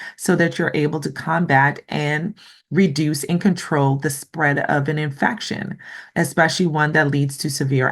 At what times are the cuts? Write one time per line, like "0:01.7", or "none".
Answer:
none